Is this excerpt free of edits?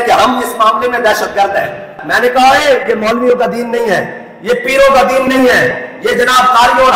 no; 1 cut; at 2.0 s

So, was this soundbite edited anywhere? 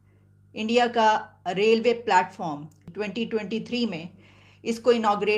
yes; 1 cut; at 2.9 s

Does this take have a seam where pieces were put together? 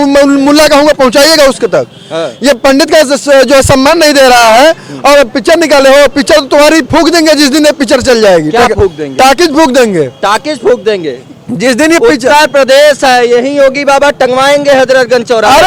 no; 0 cuts

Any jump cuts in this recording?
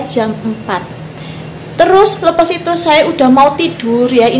no; 0 cuts

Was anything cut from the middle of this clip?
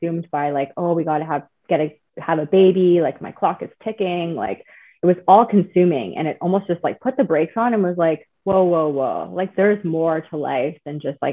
no; 0 cuts

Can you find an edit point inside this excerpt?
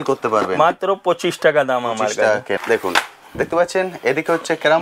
yes; 1 cut; at 2.6 s

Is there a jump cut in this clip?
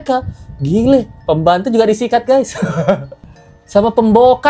no; 0 cuts

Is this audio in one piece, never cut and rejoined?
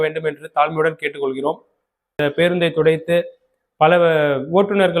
no; 1 cut; at 2.2 s

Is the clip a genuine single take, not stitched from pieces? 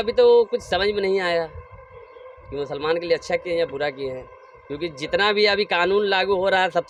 yes; 0 cuts

